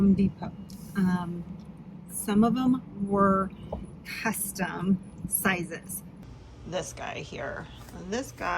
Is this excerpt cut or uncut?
cut